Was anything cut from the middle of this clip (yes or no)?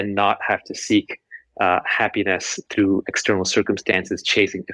no